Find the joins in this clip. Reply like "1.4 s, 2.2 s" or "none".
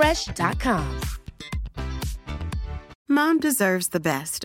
2.9 s